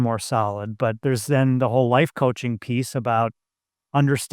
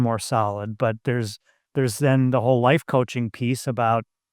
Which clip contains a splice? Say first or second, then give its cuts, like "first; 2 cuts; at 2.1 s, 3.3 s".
first; 1 cut; at 1.0 s